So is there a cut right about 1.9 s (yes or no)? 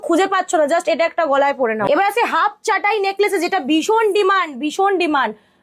yes